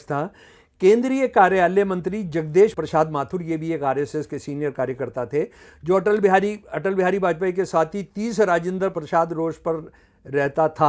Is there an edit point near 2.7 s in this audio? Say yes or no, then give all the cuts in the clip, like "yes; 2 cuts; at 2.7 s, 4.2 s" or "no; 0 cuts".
yes; 2 cuts; at 2.7 s, 8.9 s